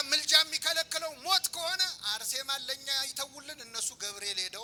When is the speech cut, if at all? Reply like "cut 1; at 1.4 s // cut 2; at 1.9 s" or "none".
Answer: none